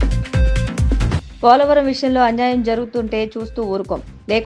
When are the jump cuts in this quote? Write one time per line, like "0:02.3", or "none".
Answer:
0:01.0

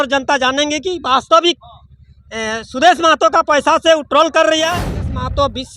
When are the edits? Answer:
0:04.8

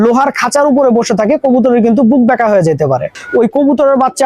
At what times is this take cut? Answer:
0:03.2

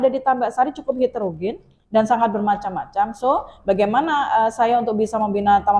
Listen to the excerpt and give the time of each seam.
none

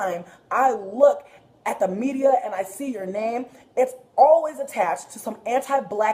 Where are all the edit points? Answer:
none

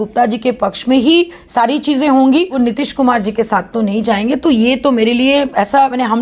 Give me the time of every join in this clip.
0:02.5

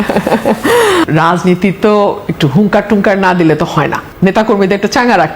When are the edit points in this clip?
0:01.0

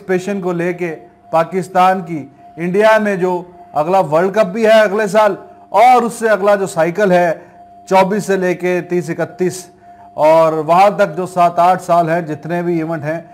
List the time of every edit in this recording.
none

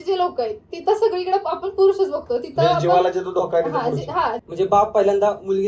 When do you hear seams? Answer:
0:04.4

